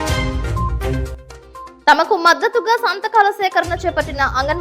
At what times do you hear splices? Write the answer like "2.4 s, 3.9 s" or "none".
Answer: 1.1 s